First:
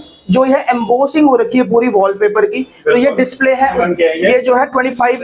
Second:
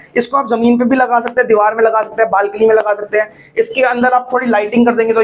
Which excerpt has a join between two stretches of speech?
first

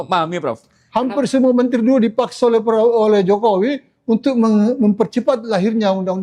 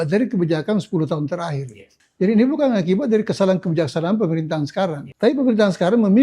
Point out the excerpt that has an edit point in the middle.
second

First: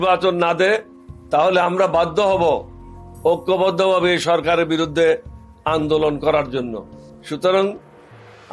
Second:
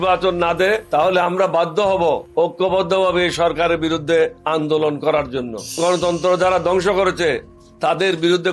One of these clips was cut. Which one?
second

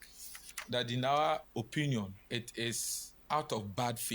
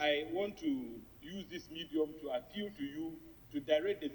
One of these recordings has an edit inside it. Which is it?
first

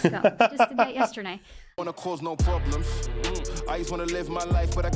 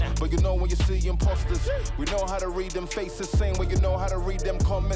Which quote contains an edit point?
first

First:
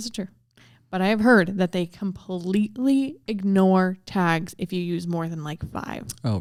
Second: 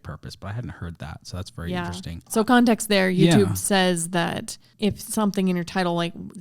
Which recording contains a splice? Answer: second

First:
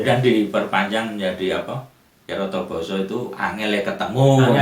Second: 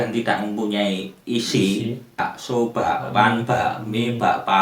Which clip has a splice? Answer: second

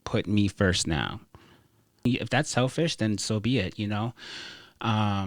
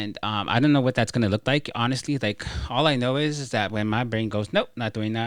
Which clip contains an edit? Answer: first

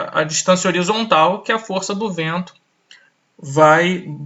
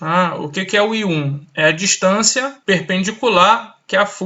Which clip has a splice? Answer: second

